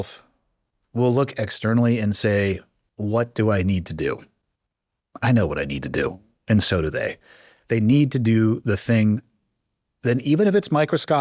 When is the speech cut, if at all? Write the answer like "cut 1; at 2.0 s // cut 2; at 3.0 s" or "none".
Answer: none